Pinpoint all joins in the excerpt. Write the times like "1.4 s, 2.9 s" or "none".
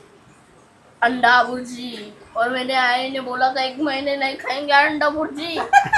none